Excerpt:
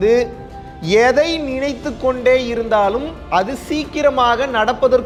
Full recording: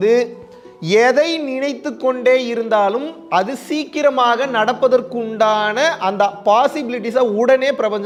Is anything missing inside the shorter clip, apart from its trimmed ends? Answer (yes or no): no